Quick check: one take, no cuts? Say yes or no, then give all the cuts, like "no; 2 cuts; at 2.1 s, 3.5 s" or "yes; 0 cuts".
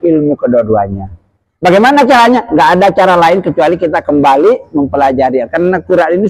yes; 0 cuts